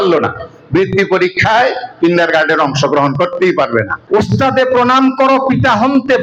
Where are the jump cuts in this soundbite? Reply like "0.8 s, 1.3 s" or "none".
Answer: 4.0 s